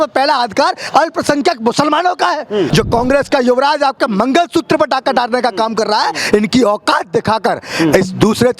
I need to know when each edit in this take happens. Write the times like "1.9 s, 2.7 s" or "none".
2.7 s